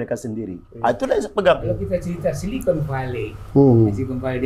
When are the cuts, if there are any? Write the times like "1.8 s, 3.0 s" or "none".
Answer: 1.7 s